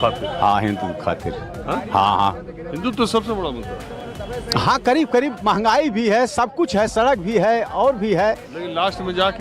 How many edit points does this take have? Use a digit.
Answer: 0